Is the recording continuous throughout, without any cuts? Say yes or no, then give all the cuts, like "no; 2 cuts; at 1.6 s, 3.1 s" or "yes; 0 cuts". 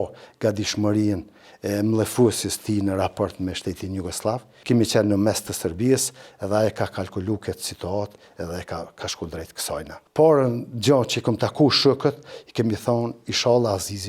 no; 2 cuts; at 4.5 s, 10.0 s